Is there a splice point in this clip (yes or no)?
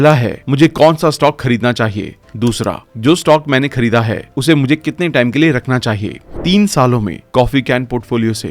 yes